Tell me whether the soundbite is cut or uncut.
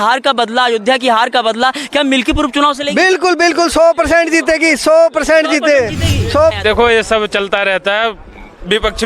cut